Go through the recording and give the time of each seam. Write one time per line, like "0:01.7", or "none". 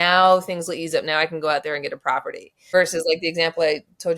0:02.6